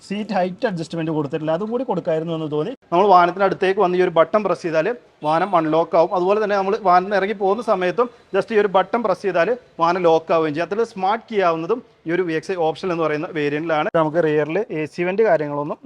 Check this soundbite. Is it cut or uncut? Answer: cut